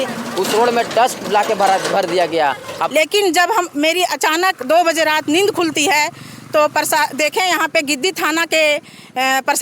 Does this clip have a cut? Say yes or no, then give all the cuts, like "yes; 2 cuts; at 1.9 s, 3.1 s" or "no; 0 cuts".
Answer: yes; 1 cut; at 2.7 s